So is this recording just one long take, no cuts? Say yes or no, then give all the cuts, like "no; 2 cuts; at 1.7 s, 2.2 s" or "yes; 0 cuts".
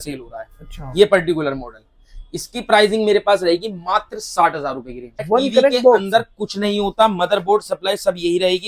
no; 1 cut; at 5.2 s